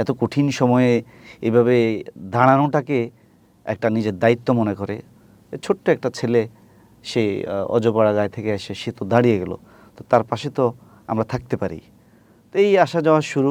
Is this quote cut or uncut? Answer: uncut